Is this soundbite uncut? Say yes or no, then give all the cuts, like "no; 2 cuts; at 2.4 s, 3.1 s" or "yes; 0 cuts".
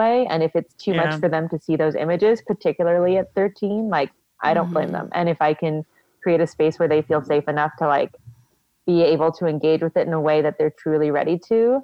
yes; 0 cuts